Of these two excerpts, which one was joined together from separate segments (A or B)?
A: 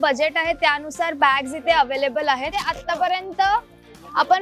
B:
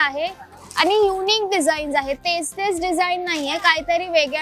A